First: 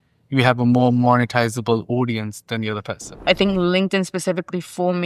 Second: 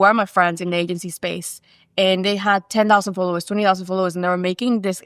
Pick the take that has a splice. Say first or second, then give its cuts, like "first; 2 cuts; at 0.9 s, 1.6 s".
first; 1 cut; at 3.1 s